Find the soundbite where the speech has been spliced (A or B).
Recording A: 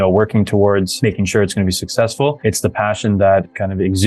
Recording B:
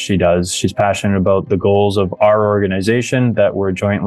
A